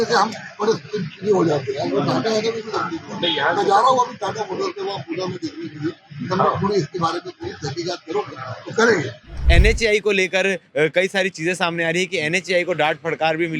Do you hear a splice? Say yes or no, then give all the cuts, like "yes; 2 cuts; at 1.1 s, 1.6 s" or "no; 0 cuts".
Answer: yes; 1 cut; at 9.4 s